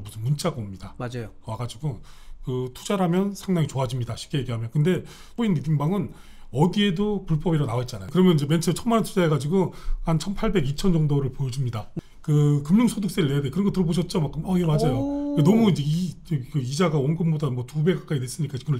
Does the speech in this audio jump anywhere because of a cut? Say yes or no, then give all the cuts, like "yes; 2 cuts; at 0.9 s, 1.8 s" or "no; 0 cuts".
yes; 3 cuts; at 5.3 s, 8.0 s, 11.9 s